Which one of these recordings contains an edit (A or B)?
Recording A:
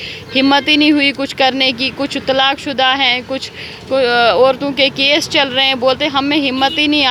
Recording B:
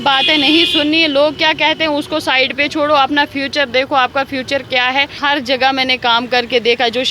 B